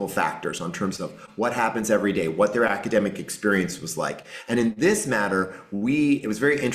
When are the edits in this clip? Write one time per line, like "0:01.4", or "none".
none